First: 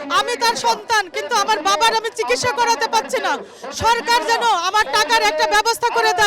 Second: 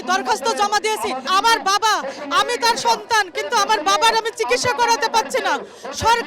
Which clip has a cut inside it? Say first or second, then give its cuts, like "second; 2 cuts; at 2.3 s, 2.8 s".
second; 1 cut; at 1.3 s